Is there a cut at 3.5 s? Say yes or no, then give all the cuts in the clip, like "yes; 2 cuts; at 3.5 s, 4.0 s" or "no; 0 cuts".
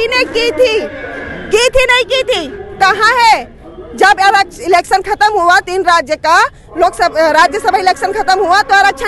no; 0 cuts